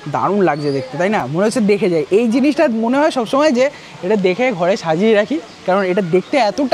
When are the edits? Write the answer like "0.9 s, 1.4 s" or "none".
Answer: none

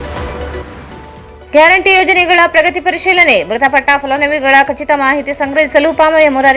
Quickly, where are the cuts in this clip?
1.4 s

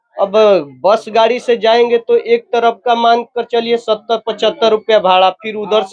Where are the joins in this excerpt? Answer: none

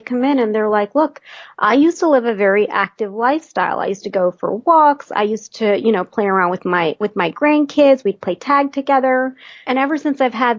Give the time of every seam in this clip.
9.6 s

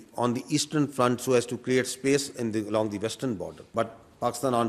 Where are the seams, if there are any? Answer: 3.6 s

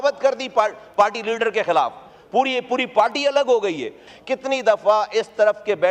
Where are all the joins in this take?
4.0 s

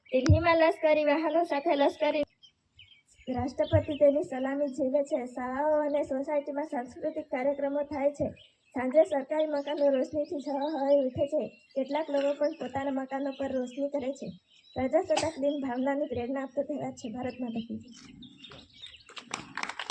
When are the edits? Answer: none

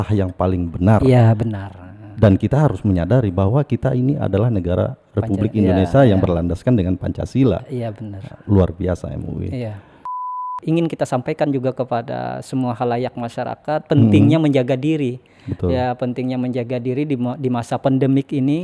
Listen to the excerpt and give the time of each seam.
10.2 s

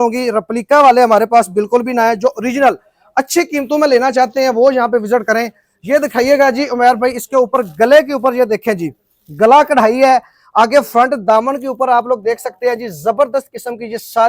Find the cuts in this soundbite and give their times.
none

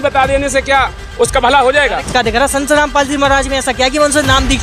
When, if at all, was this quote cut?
2.1 s

